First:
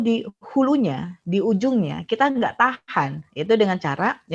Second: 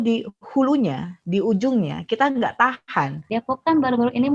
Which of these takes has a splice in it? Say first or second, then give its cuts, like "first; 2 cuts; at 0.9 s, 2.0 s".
second; 1 cut; at 3.3 s